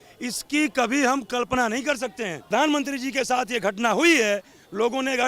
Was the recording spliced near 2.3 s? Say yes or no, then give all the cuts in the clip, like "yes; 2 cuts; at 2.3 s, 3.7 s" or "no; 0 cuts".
yes; 1 cut; at 2.3 s